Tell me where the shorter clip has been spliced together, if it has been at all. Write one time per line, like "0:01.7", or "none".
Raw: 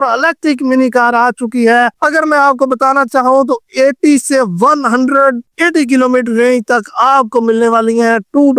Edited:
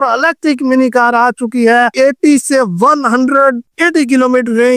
0:01.9